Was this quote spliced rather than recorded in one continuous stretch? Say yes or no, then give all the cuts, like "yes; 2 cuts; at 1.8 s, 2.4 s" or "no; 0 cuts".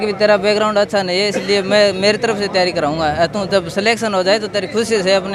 no; 0 cuts